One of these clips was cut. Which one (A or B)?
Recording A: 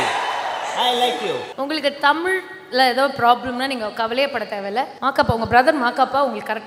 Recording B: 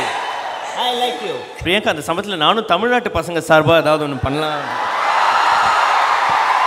A